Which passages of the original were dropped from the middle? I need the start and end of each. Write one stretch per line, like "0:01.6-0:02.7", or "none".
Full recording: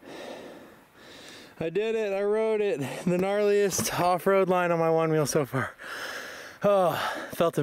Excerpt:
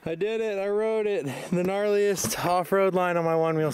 none